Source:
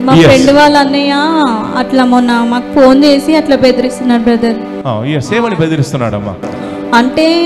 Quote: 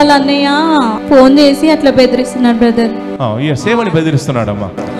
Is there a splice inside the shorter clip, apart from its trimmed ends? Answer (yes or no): yes